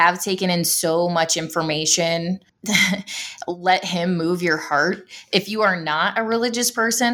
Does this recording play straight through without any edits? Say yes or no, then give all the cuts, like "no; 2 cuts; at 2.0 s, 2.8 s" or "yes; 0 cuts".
no; 1 cut; at 2.5 s